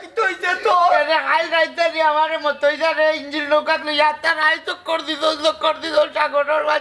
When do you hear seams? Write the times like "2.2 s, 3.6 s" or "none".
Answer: none